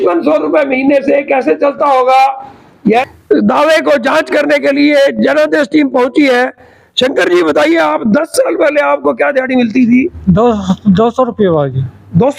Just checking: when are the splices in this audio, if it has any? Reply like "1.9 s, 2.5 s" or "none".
3.1 s